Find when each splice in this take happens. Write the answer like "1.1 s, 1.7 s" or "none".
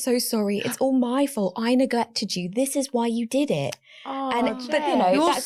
none